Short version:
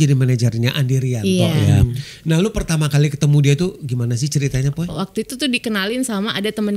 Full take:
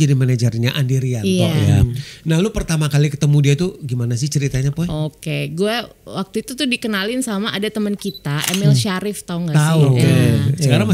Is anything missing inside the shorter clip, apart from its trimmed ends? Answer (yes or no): yes